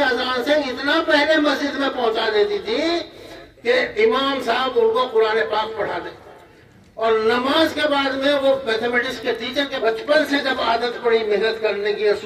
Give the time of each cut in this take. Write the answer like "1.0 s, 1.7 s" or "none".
9.7 s